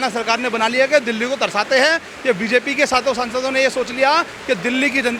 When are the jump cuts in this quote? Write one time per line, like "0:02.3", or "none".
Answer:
none